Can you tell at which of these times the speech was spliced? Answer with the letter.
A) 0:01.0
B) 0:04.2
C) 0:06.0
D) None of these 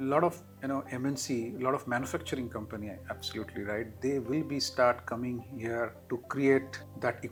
D